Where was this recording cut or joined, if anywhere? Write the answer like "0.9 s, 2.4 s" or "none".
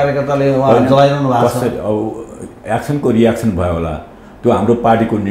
none

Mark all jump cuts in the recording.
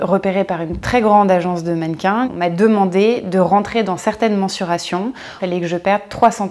2.3 s, 5.4 s

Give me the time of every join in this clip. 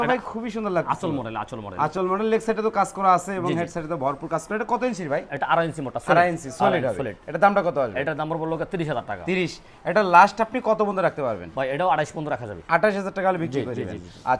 none

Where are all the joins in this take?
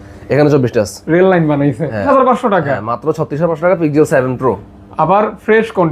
2.1 s

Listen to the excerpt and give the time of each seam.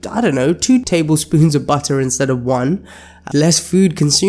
0.8 s, 3.2 s

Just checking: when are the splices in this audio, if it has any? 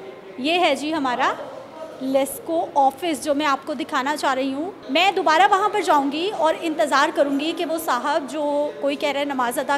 none

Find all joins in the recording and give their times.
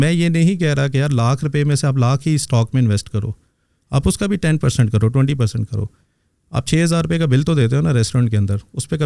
none

